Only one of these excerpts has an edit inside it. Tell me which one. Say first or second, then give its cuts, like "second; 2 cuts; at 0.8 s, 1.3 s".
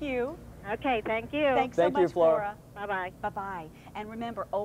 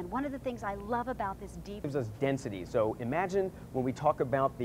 second; 1 cut; at 1.9 s